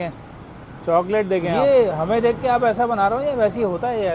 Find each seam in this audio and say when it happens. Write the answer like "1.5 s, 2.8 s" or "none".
1.6 s